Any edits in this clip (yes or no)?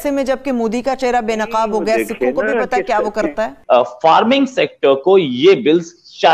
yes